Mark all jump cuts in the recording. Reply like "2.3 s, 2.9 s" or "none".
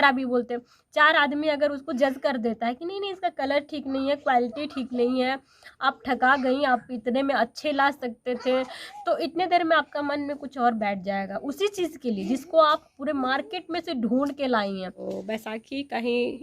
15.0 s